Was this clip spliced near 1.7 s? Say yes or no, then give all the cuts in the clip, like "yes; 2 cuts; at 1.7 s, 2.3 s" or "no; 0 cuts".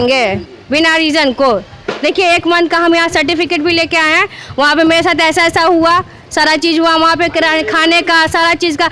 no; 0 cuts